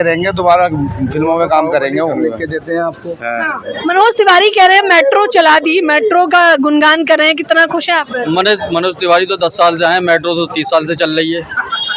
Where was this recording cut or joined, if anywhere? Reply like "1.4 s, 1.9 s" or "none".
2.2 s, 3.6 s